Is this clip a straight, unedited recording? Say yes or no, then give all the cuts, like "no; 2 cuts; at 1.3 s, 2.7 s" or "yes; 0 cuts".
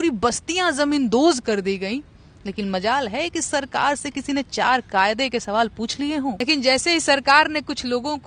no; 1 cut; at 6.4 s